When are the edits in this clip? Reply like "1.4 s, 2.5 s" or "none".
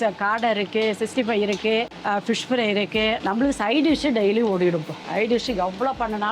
3.2 s, 5.0 s